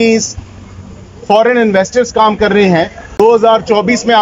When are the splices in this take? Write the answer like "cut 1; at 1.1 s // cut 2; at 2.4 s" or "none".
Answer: cut 1; at 3.2 s